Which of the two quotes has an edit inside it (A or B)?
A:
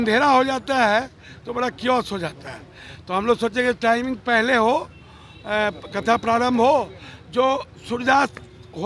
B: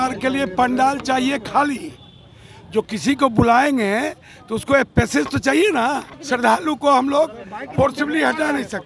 B